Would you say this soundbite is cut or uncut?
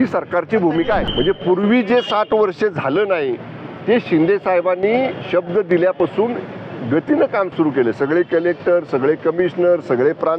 cut